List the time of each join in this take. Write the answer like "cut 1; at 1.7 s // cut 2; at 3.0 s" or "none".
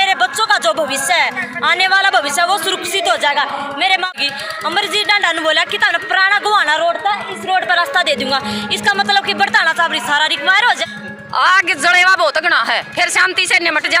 cut 1; at 4.1 s // cut 2; at 10.8 s